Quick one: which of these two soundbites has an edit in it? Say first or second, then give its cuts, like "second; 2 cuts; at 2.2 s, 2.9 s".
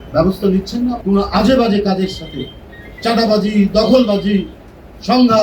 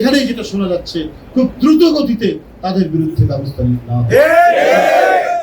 first; 1 cut; at 1.0 s